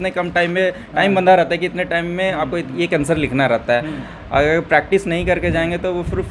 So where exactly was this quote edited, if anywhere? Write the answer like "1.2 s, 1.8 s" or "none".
none